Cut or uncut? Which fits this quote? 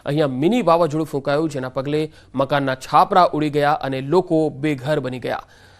cut